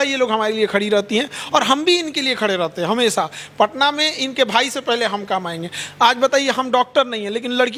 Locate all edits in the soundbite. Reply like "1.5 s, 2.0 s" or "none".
none